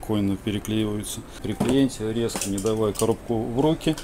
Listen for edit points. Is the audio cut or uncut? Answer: cut